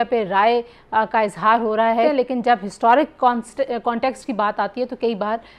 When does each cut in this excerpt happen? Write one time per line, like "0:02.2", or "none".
0:02.0